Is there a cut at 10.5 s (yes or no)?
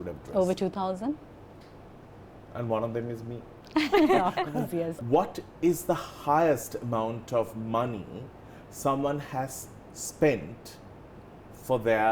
no